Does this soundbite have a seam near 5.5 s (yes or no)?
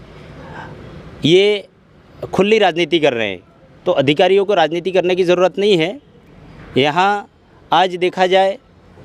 no